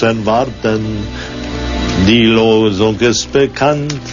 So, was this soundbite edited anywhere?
yes; 1 cut; at 1.0 s

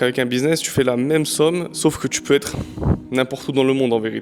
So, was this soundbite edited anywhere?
no; 0 cuts

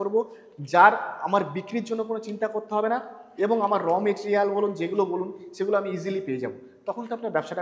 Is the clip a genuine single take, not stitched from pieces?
yes; 0 cuts

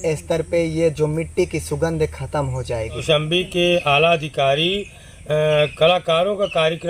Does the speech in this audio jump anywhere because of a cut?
no; 0 cuts

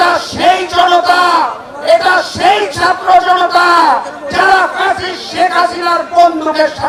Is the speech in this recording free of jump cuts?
yes; 0 cuts

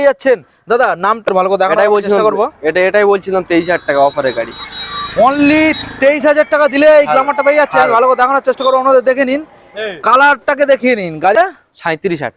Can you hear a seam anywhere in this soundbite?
yes; 2 cuts; at 1.3 s, 11.4 s

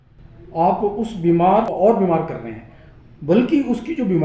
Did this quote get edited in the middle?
yes; 1 cut; at 1.7 s

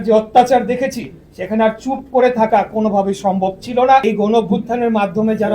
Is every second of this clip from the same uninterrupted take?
no; 1 cut; at 4.0 s

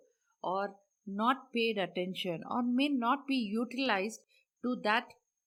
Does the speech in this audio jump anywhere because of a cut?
no; 0 cuts

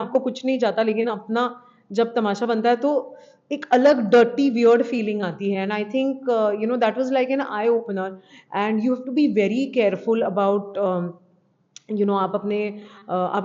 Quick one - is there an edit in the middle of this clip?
no; 0 cuts

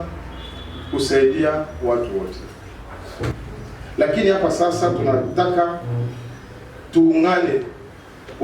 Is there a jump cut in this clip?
yes; 1 cut; at 3.4 s

